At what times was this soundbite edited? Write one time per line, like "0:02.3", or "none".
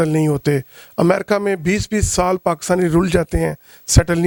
none

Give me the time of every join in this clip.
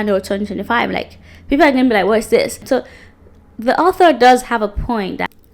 0:02.6

